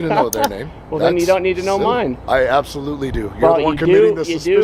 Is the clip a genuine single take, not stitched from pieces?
yes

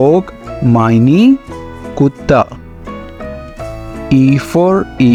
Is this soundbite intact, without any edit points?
yes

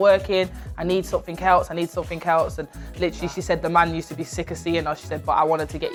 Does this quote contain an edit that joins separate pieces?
no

